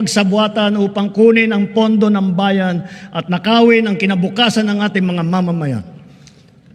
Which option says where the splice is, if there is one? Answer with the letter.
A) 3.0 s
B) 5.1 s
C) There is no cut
C